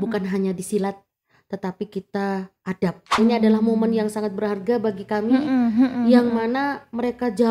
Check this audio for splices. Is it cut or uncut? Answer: cut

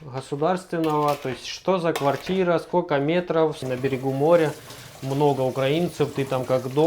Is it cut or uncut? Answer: cut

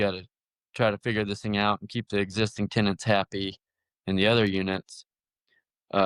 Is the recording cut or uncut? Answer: uncut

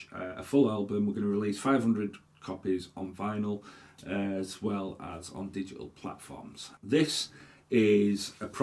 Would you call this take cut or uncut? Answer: cut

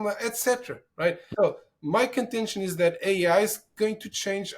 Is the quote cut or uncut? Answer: cut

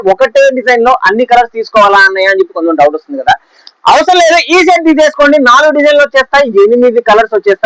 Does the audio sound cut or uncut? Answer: uncut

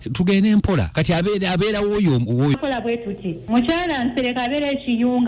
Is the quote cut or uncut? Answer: cut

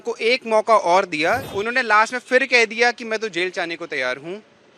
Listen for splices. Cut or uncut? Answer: cut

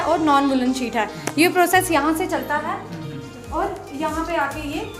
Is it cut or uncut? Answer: uncut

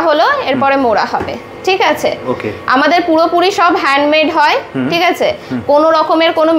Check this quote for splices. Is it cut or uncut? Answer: uncut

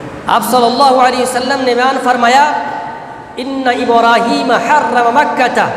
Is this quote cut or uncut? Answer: uncut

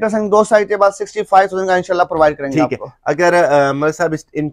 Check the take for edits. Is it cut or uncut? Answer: uncut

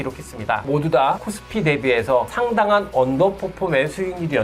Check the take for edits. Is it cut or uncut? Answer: cut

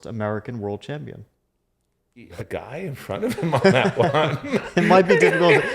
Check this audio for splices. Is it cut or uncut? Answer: cut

